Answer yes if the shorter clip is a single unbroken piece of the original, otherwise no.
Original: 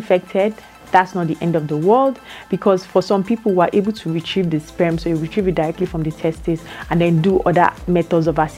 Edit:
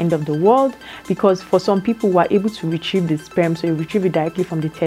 yes